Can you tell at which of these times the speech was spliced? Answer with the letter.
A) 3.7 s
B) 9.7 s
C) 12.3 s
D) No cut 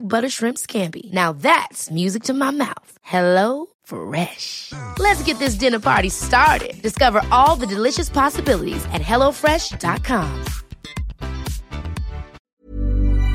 C